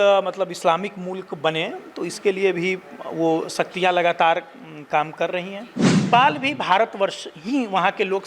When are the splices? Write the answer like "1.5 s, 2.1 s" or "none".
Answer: 6.1 s